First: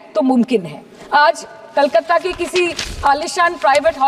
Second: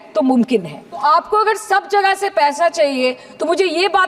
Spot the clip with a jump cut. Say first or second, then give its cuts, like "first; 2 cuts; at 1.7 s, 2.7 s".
second; 1 cut; at 1.0 s